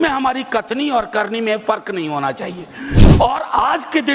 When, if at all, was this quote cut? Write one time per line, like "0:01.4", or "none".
0:03.0